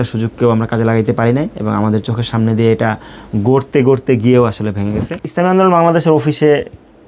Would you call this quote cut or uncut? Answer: cut